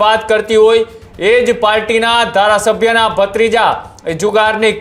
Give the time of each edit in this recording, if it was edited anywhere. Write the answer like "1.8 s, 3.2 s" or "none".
none